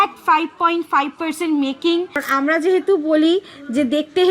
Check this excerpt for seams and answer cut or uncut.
cut